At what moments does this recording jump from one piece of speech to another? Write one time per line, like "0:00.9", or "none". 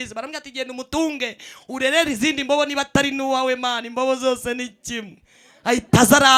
none

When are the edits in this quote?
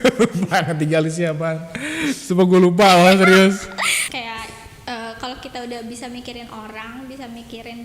0:04.0

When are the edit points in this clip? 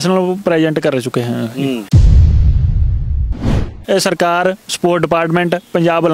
0:01.9
0:03.8

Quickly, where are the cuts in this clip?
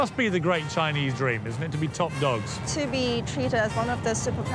0:02.6

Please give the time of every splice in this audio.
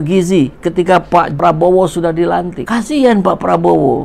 0:01.3
0:02.6

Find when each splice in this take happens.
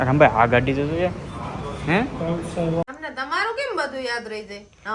0:02.9

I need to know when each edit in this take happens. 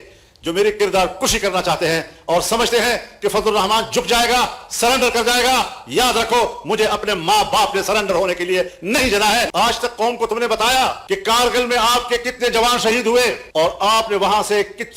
0:09.5

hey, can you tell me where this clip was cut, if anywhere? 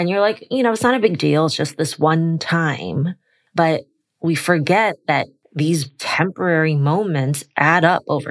0:03.3
0:05.3

